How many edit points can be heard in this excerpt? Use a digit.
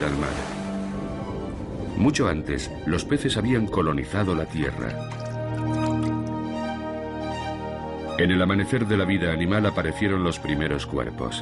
1